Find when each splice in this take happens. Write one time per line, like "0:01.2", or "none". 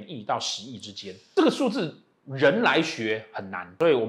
none